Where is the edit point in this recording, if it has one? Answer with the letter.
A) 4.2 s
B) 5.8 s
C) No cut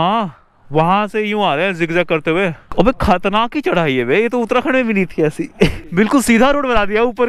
B